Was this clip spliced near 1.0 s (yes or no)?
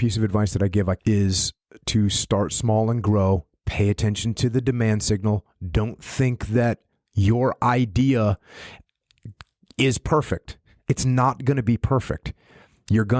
yes